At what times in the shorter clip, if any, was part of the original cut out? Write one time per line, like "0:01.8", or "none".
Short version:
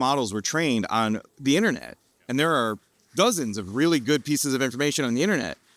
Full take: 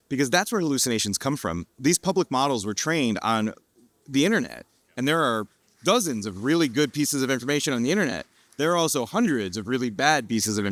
0:01.3